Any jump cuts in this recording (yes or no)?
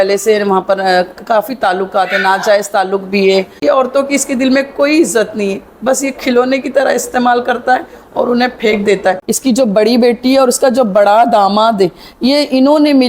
yes